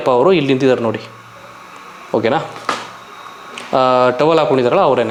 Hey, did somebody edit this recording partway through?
no; 0 cuts

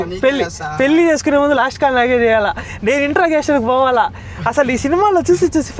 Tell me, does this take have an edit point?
no; 0 cuts

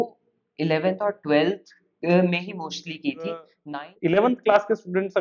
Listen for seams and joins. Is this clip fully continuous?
no; 1 cut; at 3.5 s

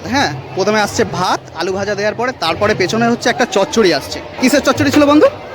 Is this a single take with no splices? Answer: no; 1 cut; at 4.4 s

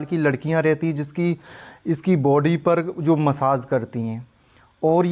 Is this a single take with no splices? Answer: yes; 0 cuts

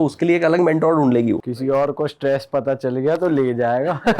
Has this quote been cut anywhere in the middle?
yes; 1 cut; at 1.5 s

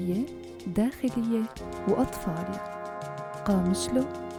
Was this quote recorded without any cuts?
yes; 0 cuts

